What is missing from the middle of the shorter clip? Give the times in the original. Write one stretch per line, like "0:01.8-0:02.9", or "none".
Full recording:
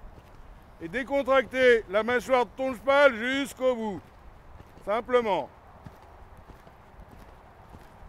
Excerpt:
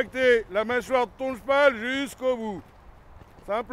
none